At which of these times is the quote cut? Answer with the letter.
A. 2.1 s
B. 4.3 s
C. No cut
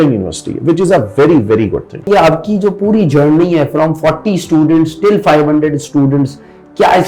A